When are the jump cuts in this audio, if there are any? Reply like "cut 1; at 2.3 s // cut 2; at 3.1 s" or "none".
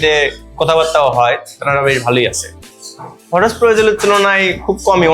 cut 1; at 2.6 s